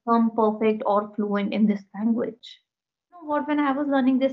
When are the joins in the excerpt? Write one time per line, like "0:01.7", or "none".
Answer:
0:03.3